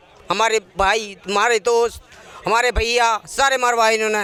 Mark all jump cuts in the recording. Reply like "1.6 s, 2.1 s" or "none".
none